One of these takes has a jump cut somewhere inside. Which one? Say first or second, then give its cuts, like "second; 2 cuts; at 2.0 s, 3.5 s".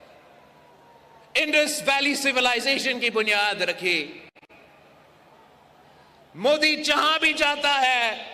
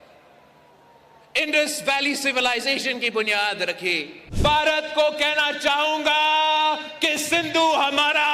second; 1 cut; at 4.2 s